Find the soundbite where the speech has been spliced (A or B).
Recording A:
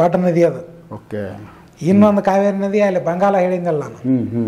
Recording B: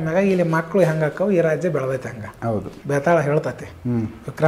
B